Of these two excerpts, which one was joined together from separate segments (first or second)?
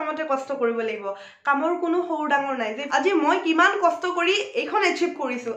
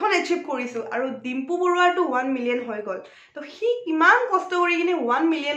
first